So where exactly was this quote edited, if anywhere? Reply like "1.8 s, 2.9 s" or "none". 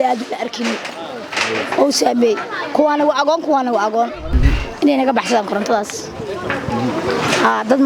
4.3 s

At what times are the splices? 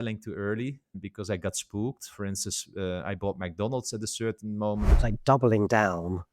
5.0 s

